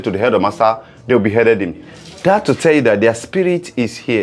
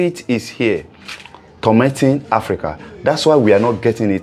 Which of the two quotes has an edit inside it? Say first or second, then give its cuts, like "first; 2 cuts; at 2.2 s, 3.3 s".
first; 1 cut; at 1.9 s